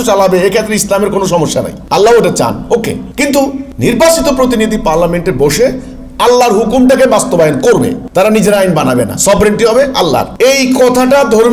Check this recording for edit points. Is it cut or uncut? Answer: cut